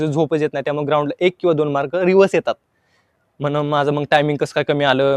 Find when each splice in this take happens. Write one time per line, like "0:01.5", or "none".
none